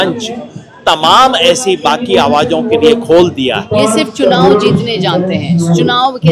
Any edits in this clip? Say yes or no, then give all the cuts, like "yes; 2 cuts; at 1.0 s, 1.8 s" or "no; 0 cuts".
yes; 1 cut; at 3.6 s